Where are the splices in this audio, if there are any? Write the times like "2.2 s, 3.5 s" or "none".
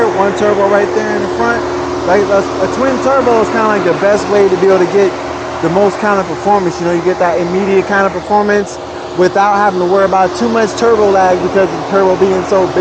none